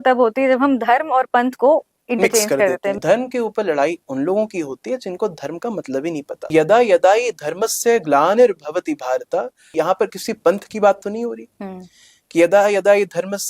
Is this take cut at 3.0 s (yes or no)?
yes